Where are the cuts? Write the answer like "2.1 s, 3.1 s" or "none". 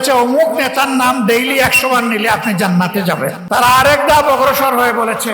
3.4 s